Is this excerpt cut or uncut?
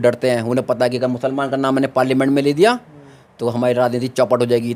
uncut